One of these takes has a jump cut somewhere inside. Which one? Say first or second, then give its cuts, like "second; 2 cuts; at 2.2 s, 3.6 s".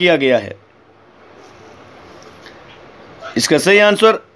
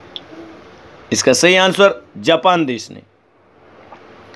first; 1 cut; at 1.5 s